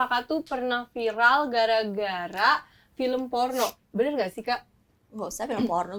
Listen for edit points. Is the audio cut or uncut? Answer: uncut